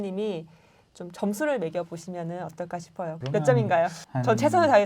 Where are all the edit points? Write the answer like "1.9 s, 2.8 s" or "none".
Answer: 3.1 s